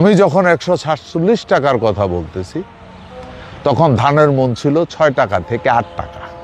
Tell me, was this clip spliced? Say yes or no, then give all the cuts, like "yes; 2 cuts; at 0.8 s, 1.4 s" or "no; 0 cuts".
no; 0 cuts